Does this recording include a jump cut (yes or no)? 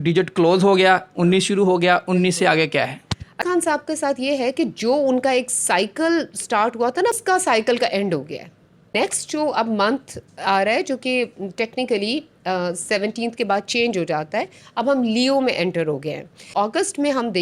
yes